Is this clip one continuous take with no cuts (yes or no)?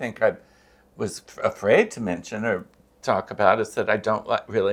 yes